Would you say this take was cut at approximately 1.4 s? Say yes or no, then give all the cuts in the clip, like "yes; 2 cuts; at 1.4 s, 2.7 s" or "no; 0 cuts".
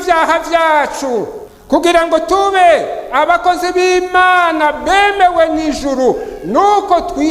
yes; 1 cut; at 1.4 s